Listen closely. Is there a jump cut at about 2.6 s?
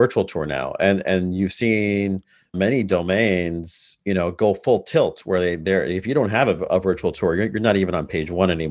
yes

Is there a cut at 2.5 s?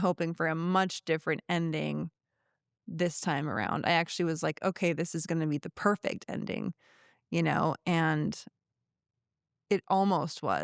no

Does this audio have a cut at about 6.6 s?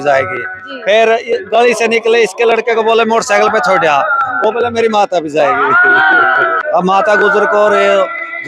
yes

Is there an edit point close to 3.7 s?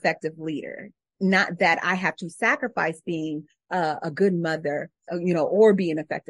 yes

